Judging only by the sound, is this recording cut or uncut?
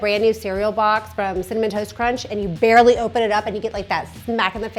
uncut